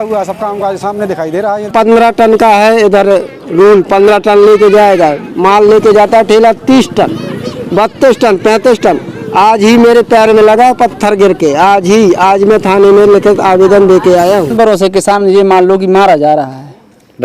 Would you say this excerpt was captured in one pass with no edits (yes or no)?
no